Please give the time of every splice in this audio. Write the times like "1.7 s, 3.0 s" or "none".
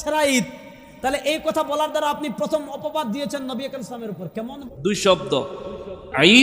4.7 s

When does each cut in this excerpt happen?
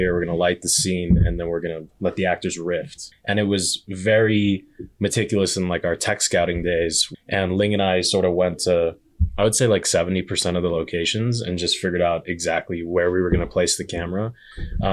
3.0 s, 7.0 s

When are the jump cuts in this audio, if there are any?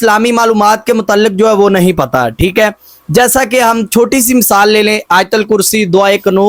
none

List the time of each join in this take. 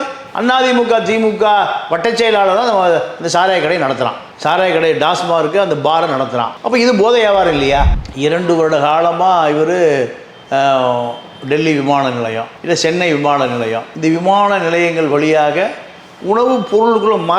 7.9 s

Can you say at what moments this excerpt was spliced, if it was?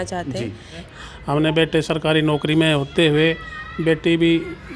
0.9 s

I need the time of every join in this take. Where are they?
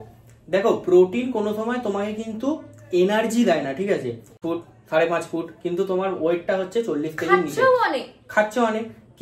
4.4 s

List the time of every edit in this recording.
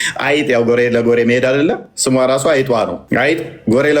3.0 s

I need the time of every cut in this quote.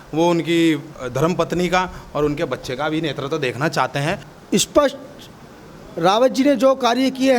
4.3 s

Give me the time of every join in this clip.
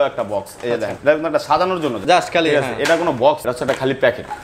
1.0 s, 2.0 s, 3.4 s

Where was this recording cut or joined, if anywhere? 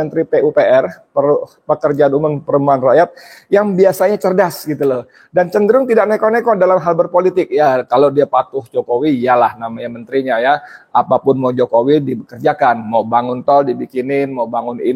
none

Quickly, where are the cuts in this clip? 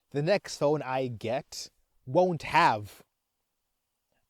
none

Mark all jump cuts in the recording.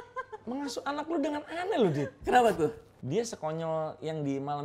2.9 s

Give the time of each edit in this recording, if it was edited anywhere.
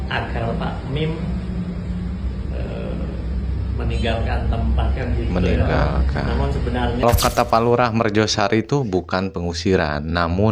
7.0 s

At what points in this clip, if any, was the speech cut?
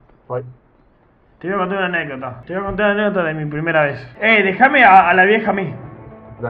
2.4 s, 4.1 s

